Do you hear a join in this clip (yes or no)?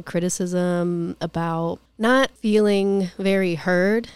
yes